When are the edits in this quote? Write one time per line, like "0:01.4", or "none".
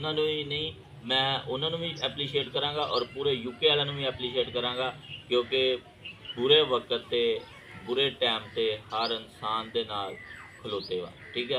none